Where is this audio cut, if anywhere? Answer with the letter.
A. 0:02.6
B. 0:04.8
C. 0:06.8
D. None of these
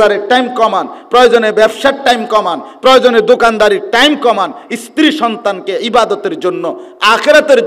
D